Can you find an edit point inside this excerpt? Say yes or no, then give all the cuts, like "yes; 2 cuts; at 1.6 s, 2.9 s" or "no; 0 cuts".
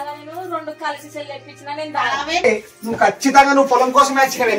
yes; 1 cut; at 2.4 s